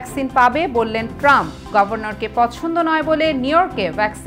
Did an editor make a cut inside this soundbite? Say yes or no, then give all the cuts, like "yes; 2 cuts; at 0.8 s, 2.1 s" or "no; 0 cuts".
no; 0 cuts